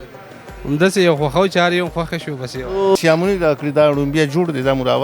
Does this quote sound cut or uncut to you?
cut